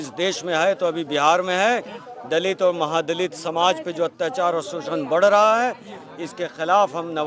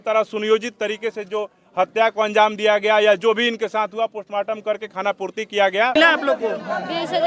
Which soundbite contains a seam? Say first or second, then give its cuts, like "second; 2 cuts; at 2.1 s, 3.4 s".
second; 1 cut; at 5.9 s